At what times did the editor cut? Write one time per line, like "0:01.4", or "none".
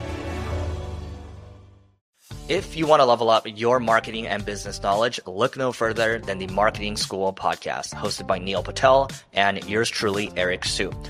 0:02.0